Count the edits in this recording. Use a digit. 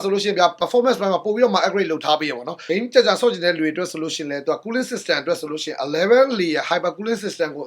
1